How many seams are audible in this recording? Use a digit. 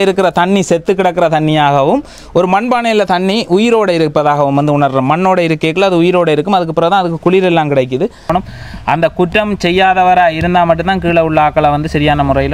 1